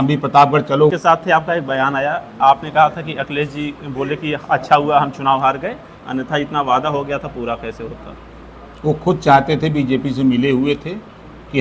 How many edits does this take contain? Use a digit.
1